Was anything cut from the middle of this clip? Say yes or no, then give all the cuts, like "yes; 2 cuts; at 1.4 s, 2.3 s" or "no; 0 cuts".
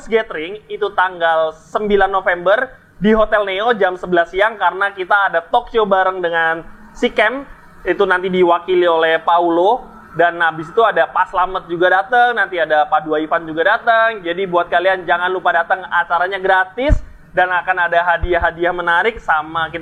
no; 0 cuts